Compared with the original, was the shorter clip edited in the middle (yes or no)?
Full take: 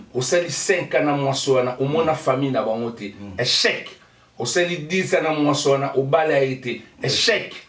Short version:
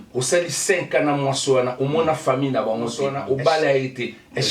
yes